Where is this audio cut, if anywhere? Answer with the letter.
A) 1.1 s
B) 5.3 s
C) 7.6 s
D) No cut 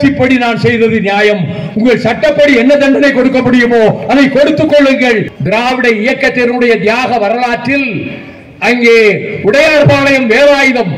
B